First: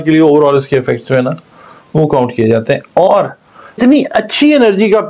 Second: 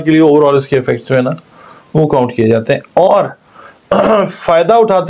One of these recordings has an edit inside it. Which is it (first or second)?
first